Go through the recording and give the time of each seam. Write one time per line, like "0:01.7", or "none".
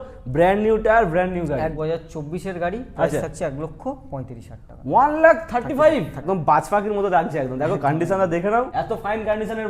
0:01.8
0:06.2
0:08.7